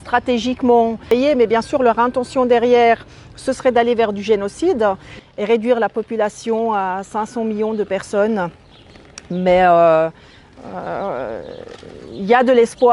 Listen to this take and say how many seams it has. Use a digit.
2